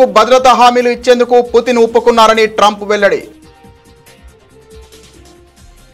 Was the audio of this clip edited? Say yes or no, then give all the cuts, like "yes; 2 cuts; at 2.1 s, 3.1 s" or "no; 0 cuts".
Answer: no; 0 cuts